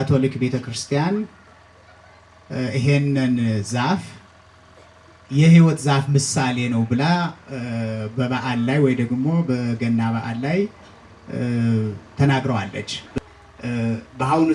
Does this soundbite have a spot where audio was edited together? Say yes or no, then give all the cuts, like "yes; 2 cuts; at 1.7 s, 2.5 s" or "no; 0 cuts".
yes; 1 cut; at 13.0 s